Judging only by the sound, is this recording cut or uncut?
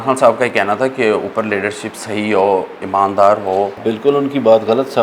cut